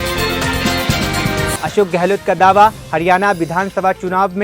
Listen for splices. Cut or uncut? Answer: uncut